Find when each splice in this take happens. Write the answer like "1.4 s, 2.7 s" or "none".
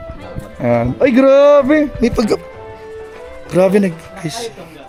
none